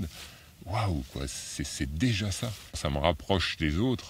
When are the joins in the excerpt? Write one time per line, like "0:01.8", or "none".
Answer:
0:02.8